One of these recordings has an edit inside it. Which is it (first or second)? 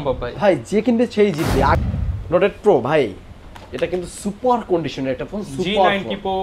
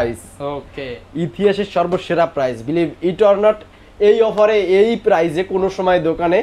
first